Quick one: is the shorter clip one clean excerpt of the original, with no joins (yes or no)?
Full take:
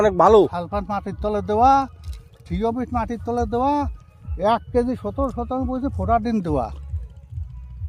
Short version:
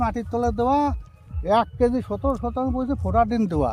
yes